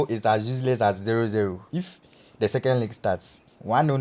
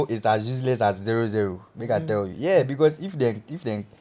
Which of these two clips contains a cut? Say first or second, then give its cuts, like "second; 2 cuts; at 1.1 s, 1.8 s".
first; 1 cut; at 1.6 s